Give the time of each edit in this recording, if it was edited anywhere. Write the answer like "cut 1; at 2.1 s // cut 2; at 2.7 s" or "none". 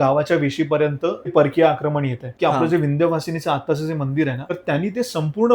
cut 1; at 1.3 s // cut 2; at 2.3 s // cut 3; at 4.4 s